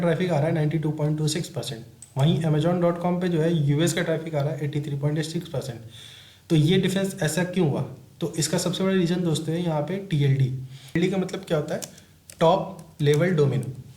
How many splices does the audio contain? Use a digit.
0